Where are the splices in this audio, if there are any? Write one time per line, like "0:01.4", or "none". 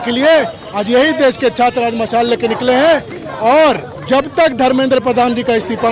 none